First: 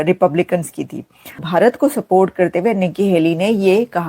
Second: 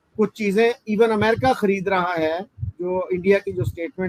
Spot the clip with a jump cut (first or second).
first